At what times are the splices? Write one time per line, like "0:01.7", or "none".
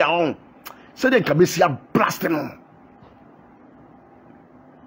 0:03.6

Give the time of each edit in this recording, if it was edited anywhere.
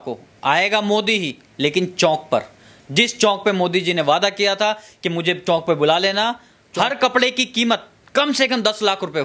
0:06.4

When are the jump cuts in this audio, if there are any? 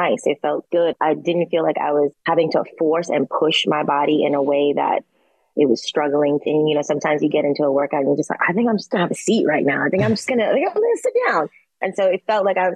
0:00.9

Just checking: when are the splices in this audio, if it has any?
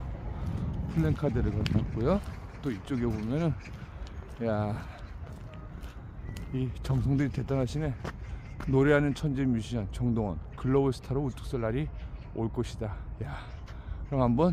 none

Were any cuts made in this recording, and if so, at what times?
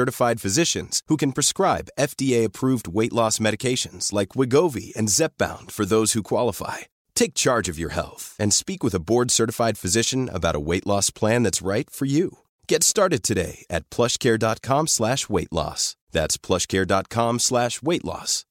none

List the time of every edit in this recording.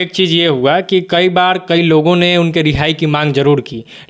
none

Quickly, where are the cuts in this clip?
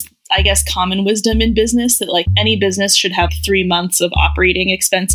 none

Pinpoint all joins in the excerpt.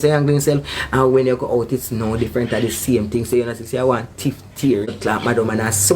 0:04.9

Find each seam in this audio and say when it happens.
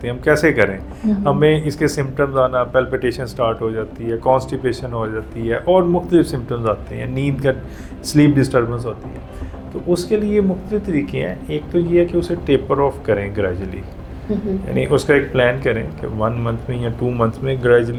none

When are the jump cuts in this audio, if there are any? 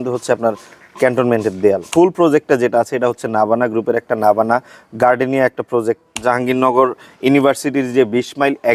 0:01.8
0:06.2

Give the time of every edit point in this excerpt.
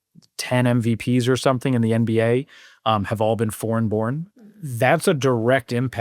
0:04.3

